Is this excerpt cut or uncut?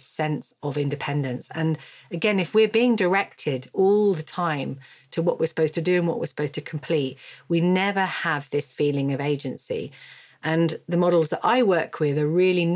uncut